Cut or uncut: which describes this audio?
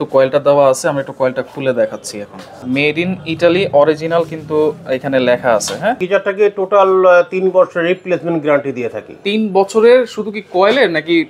cut